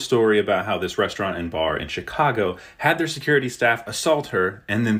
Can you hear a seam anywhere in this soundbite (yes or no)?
no